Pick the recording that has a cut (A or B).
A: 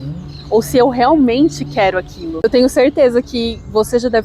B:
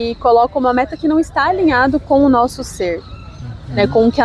A